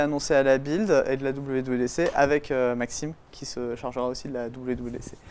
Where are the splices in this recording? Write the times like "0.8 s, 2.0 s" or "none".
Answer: none